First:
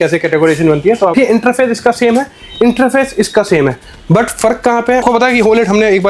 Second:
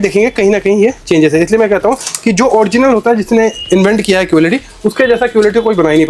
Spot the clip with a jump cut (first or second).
first